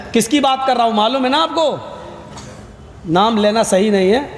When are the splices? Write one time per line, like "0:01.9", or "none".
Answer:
none